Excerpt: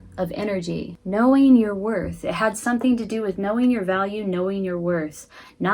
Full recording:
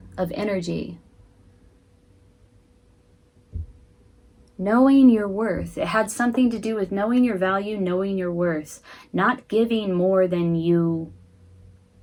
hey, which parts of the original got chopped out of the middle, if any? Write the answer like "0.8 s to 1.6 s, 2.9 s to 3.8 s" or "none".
1.0 s to 4.5 s